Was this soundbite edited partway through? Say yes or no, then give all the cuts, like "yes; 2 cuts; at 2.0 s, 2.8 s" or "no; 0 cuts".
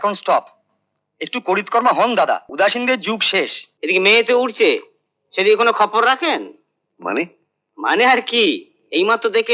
yes; 2 cuts; at 2.5 s, 3.6 s